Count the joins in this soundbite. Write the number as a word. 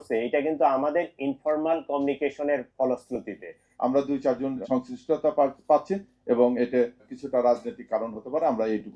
one